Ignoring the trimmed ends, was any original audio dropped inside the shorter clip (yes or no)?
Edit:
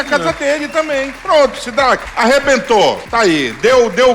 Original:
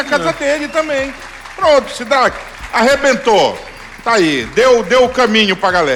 yes